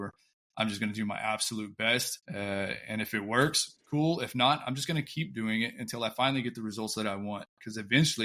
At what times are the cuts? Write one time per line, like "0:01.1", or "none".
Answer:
0:02.2

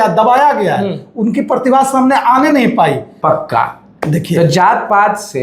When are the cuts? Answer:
0:03.1

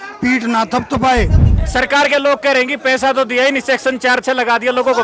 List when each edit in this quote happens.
0:01.6

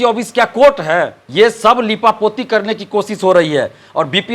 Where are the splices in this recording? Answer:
0:01.2

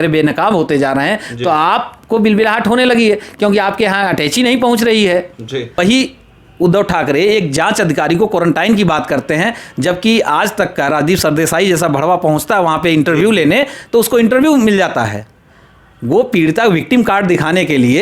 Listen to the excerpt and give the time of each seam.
0:05.8

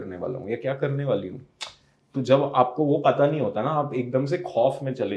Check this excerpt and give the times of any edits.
none

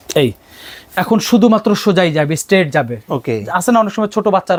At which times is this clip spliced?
none

